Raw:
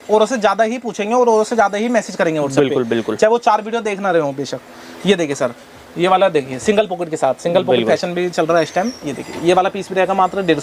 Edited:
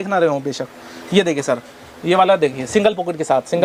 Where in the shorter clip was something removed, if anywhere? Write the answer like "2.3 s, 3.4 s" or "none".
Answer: none